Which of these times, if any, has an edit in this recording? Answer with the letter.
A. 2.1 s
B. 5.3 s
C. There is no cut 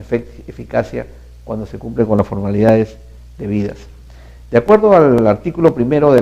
A